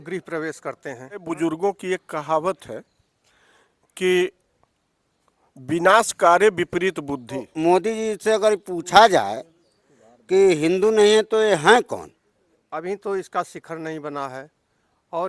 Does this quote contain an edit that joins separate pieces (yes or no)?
yes